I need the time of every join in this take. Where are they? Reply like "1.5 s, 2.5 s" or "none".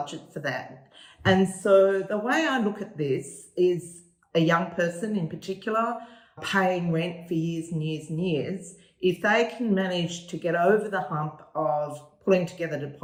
none